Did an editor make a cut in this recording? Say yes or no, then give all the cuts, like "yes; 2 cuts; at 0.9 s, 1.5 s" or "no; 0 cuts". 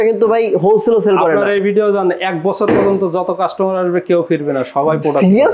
no; 0 cuts